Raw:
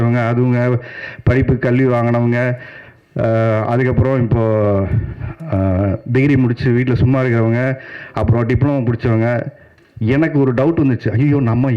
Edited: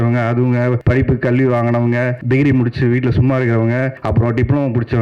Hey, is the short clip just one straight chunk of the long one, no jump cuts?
no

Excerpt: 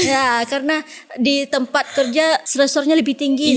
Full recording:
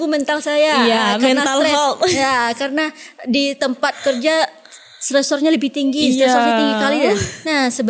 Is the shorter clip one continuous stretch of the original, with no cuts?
no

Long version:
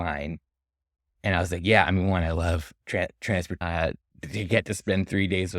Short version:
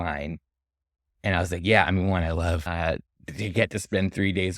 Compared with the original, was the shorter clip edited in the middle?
yes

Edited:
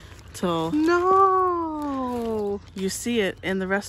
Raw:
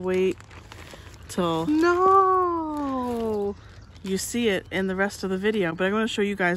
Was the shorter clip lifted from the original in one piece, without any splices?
no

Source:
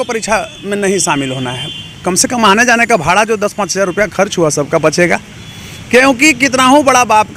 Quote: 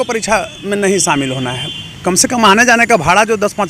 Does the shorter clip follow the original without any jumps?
yes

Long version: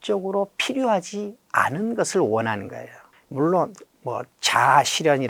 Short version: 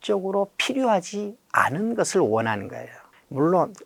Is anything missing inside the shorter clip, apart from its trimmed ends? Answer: no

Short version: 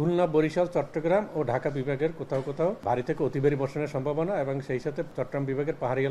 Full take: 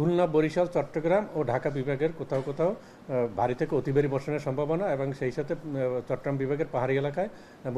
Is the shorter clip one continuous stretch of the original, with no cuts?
no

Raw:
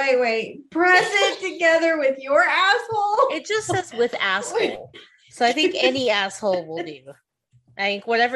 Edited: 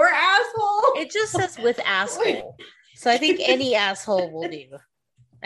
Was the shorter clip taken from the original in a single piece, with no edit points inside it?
yes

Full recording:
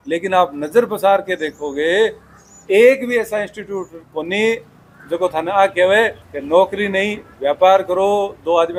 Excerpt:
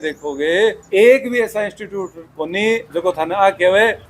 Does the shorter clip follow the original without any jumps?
no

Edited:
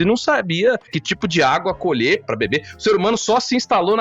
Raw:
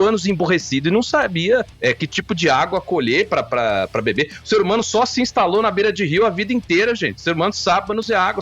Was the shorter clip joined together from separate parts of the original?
yes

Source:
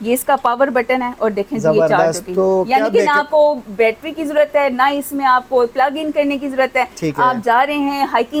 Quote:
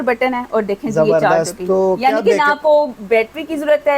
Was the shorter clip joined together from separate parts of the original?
no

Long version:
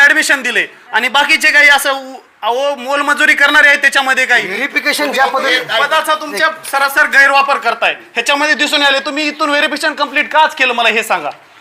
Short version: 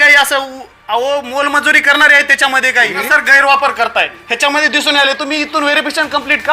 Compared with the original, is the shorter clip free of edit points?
no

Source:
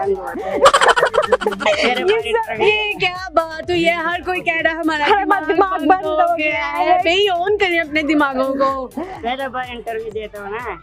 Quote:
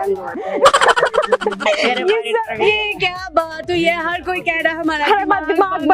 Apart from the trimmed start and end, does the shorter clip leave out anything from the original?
no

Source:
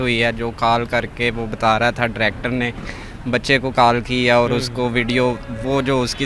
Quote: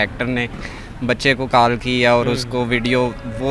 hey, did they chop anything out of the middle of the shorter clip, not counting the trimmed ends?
no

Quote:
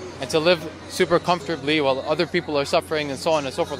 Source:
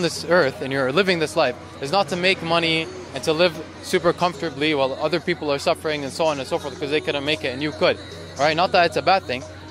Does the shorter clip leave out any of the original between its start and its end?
no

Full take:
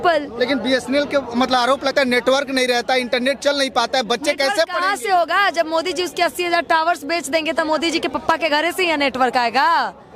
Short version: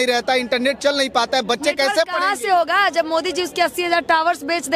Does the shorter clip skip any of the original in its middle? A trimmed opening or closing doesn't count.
no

